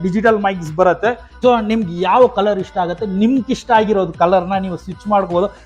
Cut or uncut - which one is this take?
cut